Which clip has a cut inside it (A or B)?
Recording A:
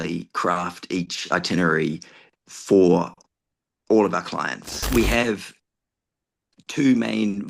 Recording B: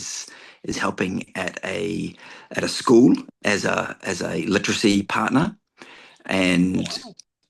A